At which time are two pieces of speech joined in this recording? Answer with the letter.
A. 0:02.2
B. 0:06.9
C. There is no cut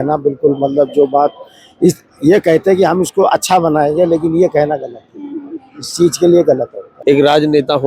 B